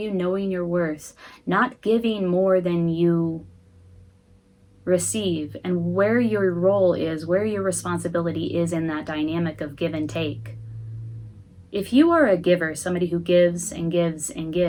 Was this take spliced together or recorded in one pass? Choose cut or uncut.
uncut